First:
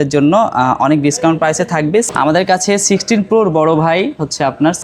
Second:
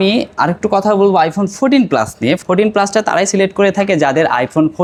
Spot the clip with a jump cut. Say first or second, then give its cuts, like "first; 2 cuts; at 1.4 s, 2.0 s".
first; 1 cut; at 2.1 s